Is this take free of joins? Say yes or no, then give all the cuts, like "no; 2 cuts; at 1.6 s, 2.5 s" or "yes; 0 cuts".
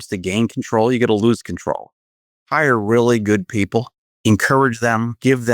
no; 2 cuts; at 2.4 s, 4.0 s